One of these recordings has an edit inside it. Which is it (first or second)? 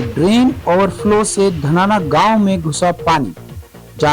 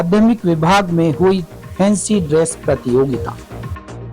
second